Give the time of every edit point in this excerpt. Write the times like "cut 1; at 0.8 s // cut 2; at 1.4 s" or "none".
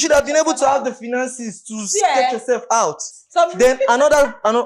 cut 1; at 3.1 s